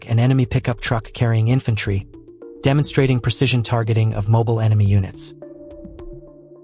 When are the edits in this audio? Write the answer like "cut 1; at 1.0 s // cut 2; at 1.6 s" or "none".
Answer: cut 1; at 5.1 s